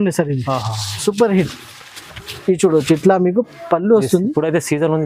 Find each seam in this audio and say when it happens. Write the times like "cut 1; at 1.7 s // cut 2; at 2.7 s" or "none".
none